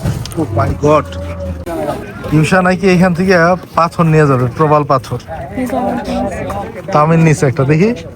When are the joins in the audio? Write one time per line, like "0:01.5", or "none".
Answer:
0:01.7